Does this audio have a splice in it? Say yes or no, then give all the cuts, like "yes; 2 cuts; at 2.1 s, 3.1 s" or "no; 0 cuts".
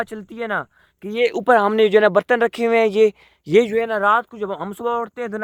no; 0 cuts